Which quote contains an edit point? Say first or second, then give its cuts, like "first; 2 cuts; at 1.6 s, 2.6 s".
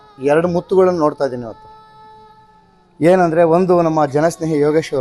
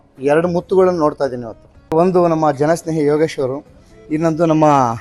second; 1 cut; at 1.9 s